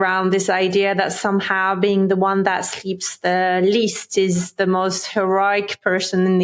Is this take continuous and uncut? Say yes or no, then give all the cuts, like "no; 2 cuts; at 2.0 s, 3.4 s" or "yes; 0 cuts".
yes; 0 cuts